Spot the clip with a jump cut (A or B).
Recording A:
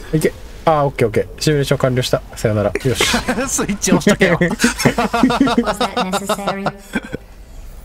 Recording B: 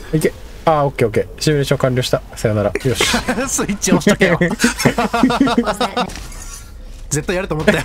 B